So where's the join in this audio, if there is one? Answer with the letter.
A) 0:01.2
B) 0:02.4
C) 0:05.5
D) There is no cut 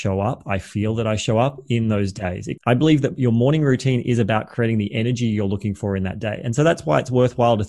B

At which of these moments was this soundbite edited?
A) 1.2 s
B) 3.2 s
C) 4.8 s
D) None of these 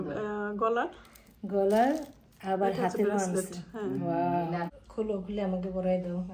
C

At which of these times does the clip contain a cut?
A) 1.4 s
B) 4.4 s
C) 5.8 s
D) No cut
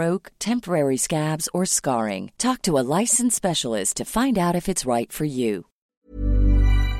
C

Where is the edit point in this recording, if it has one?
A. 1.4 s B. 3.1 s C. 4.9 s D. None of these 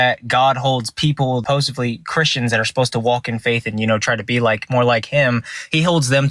A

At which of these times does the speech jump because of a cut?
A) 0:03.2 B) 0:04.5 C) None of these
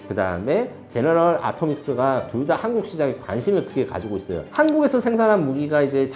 B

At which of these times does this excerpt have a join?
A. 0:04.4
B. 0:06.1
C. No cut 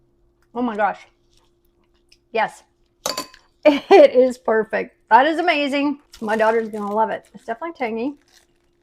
B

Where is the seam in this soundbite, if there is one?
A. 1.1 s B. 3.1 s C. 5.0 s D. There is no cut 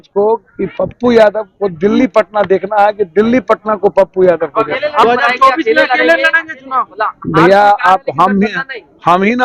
C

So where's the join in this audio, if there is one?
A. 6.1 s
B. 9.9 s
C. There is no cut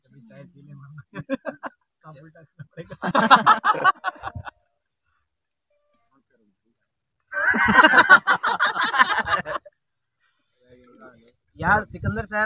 C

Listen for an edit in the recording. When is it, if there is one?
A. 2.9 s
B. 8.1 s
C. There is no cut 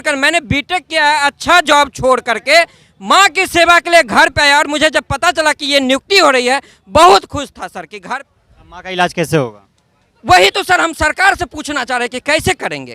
B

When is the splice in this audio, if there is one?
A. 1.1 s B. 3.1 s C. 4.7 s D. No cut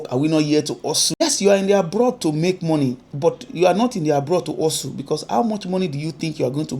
A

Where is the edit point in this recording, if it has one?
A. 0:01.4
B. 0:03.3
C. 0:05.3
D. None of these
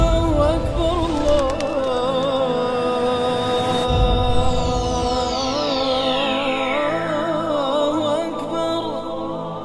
D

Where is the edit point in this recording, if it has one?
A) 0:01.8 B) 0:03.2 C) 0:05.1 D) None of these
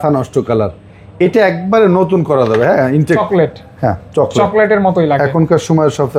B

